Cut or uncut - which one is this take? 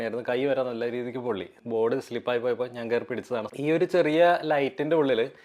cut